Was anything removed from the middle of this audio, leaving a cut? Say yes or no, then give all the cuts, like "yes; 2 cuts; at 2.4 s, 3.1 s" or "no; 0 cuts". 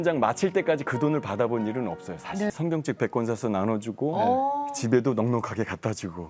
yes; 1 cut; at 2.5 s